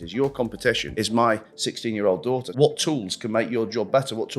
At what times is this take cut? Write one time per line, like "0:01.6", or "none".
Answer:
0:00.9
0:02.5